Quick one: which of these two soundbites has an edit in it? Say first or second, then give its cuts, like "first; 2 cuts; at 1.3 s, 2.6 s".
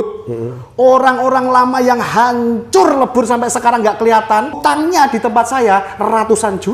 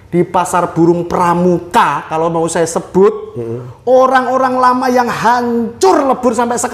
first; 1 cut; at 4.6 s